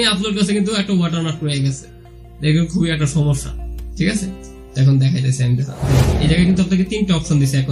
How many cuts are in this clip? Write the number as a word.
one